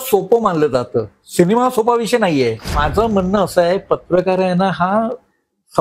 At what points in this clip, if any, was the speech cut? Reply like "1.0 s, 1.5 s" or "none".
2.8 s